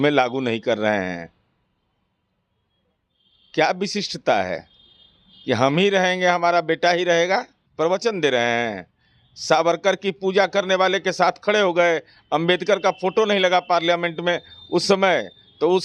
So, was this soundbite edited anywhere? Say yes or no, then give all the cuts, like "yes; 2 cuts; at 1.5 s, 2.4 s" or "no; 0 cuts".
yes; 1 cut; at 7.6 s